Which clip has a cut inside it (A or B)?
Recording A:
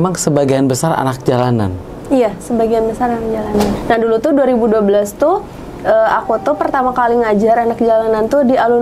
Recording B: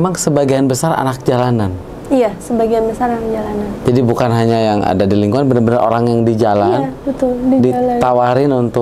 A